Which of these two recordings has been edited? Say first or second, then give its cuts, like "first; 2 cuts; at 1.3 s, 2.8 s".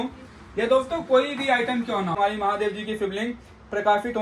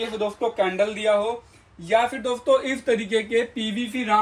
first; 1 cut; at 2.2 s